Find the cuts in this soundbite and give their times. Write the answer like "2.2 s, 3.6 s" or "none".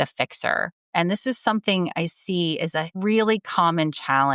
2.9 s